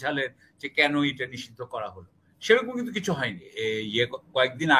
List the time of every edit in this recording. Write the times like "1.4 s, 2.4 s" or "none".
3.5 s